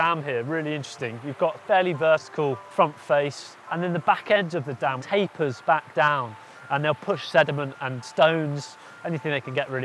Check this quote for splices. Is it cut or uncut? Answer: cut